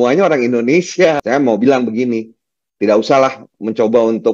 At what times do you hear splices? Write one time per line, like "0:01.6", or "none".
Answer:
0:01.2

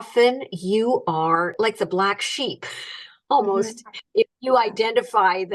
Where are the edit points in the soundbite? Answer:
0:01.5

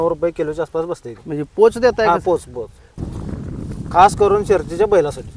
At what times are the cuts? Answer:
0:03.0

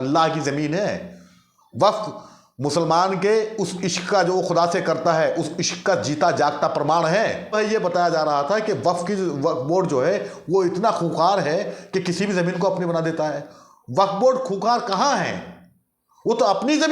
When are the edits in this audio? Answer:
0:07.5

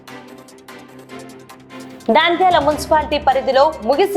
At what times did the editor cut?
none

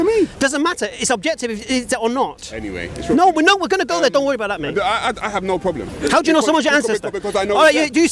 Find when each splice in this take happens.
0:05.9

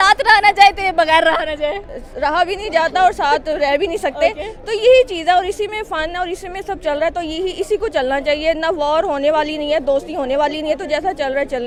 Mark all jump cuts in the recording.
none

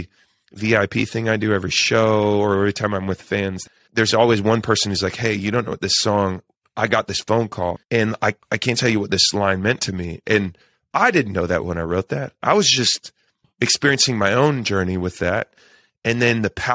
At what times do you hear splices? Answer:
0:08.0

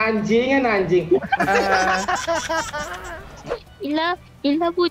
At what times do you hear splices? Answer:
0:03.4

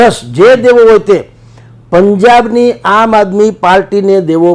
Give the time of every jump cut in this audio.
none

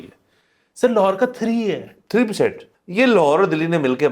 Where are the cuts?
0:02.6

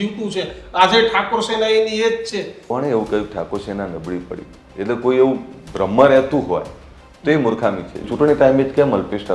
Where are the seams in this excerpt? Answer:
0:02.6
0:08.0

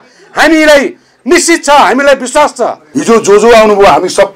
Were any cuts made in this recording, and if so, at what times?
0:02.9

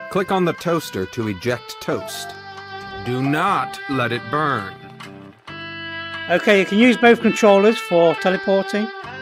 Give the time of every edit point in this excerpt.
none

